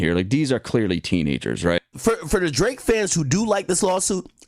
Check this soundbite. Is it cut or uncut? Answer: cut